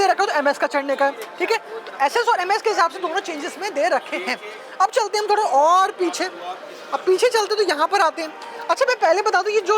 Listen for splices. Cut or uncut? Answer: uncut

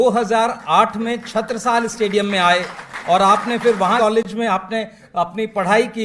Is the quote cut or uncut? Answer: cut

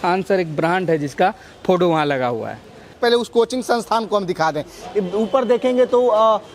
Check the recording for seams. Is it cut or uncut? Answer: cut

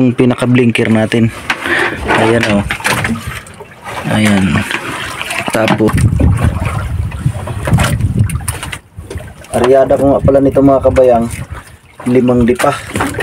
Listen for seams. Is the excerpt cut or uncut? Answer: cut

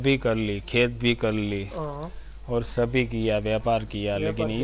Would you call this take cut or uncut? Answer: uncut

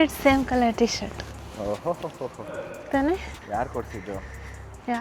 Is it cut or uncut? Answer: uncut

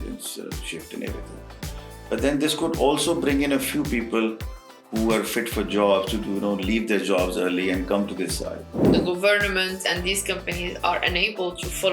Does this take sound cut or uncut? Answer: cut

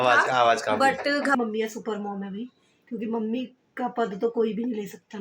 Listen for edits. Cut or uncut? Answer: cut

